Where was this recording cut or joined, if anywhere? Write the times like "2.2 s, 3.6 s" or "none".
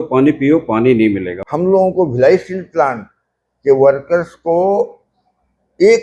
1.3 s